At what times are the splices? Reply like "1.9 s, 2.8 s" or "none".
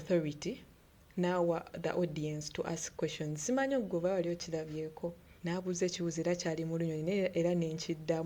5.3 s